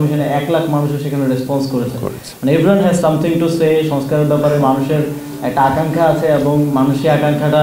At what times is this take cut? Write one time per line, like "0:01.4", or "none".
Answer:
none